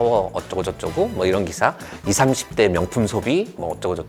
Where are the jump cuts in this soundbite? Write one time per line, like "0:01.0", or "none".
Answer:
none